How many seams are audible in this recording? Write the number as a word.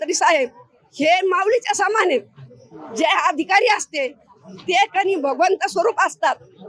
zero